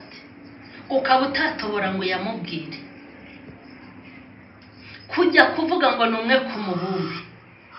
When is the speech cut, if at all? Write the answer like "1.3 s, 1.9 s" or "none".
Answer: none